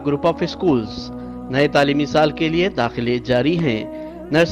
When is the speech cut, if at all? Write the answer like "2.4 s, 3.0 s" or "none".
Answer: none